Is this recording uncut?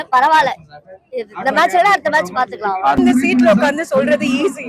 no; 1 cut; at 3.0 s

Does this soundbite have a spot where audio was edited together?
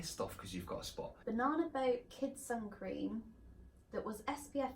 yes; 1 cut; at 1.2 s

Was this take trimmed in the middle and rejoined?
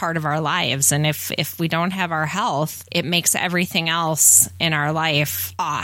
no; 0 cuts

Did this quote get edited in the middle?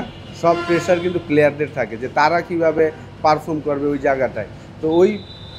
no; 0 cuts

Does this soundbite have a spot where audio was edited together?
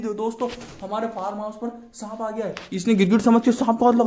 no; 0 cuts

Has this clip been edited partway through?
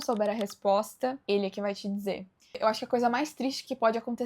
yes; 2 cuts; at 1.2 s, 2.6 s

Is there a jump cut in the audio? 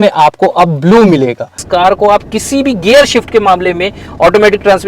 yes; 1 cut; at 1.6 s

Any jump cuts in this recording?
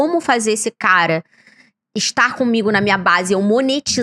no; 0 cuts

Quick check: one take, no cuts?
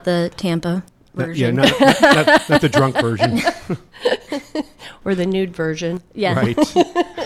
yes; 0 cuts

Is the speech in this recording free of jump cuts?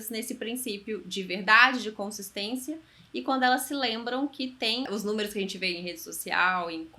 no; 1 cut; at 4.9 s

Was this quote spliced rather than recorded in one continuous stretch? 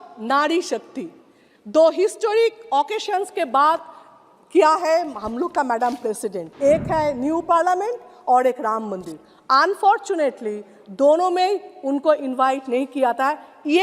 yes; 1 cut; at 6.5 s

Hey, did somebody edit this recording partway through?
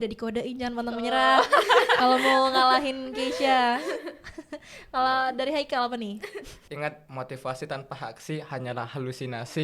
yes; 1 cut; at 6.6 s

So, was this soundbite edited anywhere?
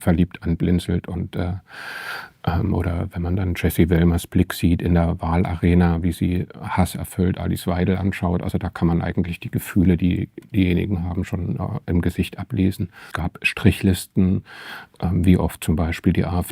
yes; 1 cut; at 13.1 s

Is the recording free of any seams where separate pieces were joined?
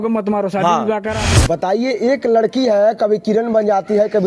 no; 1 cut; at 1.2 s

